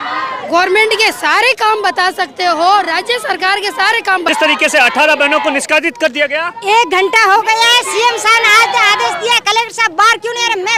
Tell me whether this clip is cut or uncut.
cut